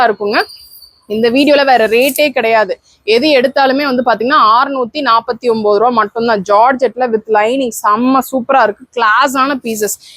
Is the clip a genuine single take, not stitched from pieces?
yes; 0 cuts

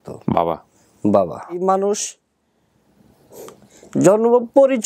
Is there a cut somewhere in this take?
yes; 1 cut; at 1.6 s

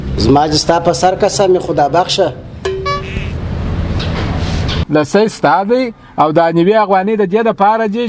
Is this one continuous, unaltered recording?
no; 1 cut; at 4.7 s

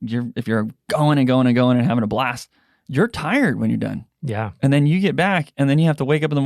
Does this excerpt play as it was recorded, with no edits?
yes; 0 cuts

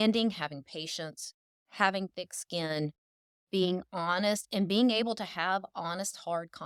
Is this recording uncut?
yes; 0 cuts

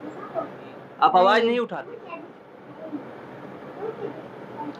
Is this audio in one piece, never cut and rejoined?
no; 1 cut; at 1.7 s

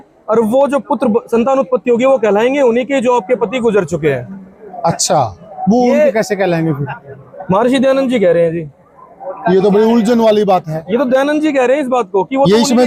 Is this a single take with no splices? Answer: yes; 0 cuts

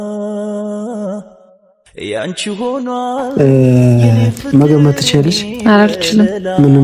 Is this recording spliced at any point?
yes; 1 cut; at 3.3 s

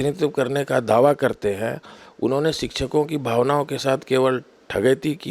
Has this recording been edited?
no; 0 cuts

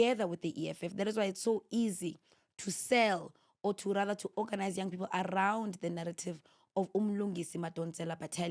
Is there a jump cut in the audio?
no; 0 cuts

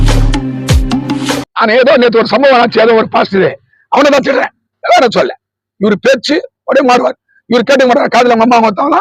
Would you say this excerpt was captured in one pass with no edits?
no; 1 cut; at 1.5 s

